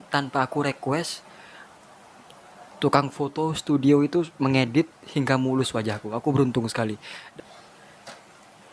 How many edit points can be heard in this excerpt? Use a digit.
1